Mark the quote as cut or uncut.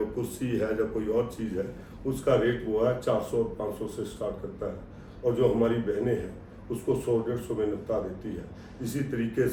uncut